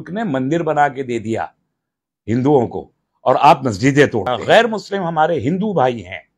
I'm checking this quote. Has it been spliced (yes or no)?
yes